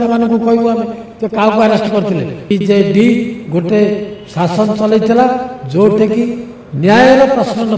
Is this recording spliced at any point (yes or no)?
yes